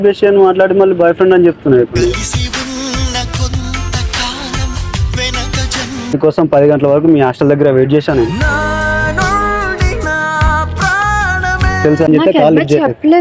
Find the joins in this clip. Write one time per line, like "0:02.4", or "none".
0:06.2
0:12.1